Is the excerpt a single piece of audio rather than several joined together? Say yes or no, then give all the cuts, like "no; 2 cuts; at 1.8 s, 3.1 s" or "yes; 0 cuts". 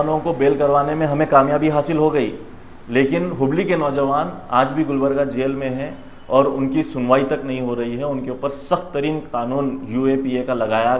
yes; 0 cuts